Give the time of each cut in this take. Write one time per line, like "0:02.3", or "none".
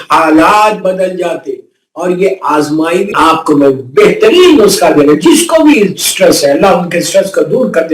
0:03.1